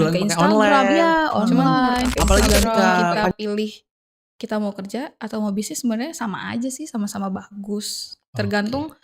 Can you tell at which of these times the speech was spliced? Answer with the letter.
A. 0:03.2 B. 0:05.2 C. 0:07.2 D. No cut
A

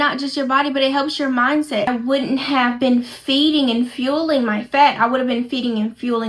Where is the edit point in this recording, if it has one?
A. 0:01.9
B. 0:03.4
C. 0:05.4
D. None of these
A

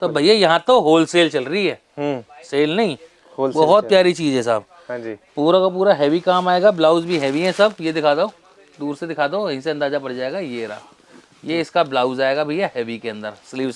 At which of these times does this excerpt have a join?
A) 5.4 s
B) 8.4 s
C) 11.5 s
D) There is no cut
D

